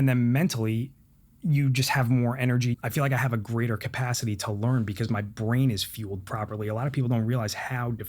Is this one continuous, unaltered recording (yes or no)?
no